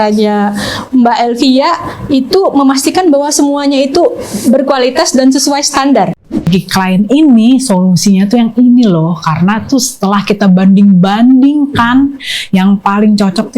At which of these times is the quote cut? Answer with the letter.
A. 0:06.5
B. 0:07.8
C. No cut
A